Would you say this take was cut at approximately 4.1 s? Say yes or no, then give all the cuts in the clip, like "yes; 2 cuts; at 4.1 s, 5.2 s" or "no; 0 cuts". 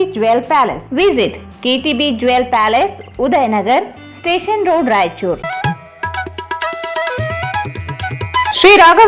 no; 0 cuts